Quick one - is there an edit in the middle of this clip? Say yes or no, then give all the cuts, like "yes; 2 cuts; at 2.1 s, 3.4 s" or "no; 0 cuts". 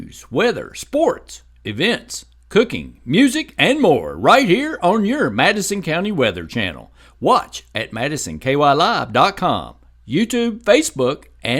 no; 0 cuts